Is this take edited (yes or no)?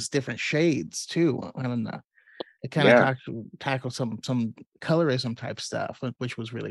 no